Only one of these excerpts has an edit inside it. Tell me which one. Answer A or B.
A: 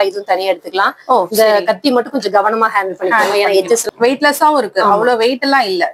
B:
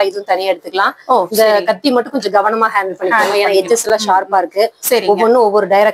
A